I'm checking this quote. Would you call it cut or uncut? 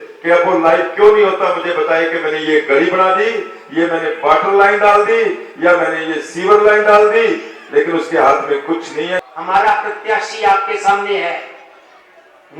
cut